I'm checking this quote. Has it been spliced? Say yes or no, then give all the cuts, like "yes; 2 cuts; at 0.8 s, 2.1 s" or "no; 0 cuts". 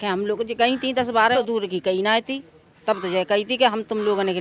yes; 1 cut; at 1.4 s